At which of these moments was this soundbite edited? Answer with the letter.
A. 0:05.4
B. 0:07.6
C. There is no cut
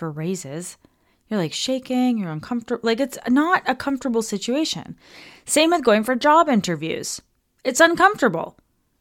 C